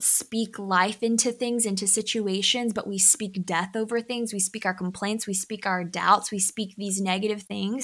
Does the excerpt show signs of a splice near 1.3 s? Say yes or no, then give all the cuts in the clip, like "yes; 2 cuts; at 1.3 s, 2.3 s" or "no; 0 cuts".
no; 0 cuts